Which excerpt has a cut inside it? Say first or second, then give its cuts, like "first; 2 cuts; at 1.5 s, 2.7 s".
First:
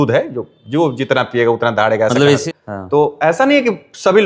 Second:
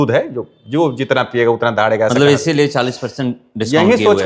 first; 1 cut; at 2.5 s